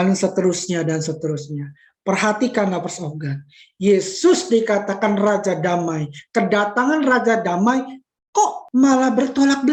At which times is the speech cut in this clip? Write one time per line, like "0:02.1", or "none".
none

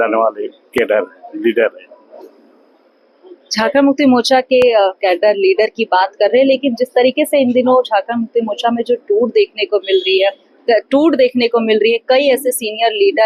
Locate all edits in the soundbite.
none

